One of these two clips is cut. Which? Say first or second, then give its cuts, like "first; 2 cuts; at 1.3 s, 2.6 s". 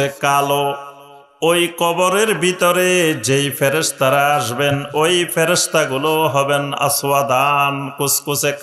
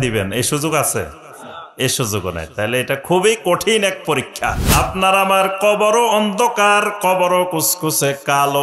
second; 1 cut; at 4.6 s